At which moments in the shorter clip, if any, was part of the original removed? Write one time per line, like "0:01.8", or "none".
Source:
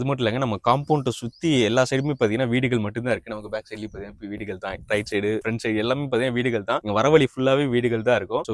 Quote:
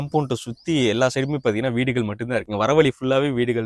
0:02.5